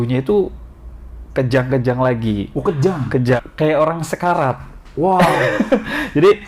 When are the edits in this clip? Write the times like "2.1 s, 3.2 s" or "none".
3.4 s